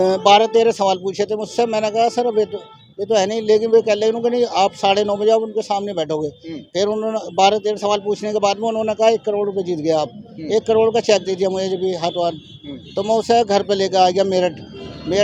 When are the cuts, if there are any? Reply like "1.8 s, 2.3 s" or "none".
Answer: none